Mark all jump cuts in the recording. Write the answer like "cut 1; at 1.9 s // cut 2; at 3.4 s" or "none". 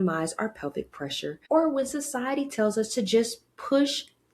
cut 1; at 1.4 s